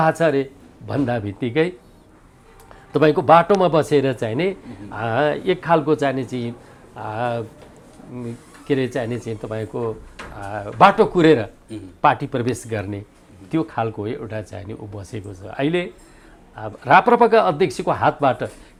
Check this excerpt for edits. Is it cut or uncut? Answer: uncut